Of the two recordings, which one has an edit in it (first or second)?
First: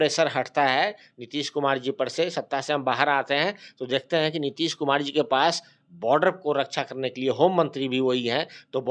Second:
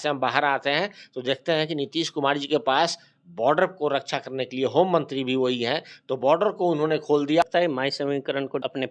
second